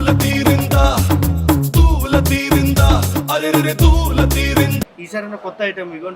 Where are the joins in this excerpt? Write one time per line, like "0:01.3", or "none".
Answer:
0:05.0